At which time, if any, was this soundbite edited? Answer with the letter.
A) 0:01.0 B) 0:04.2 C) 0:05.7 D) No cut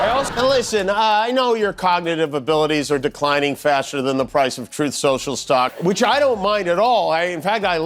C